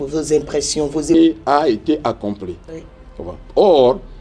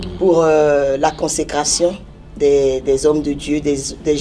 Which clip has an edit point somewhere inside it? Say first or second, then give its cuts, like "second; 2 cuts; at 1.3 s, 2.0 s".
first; 1 cut; at 1.1 s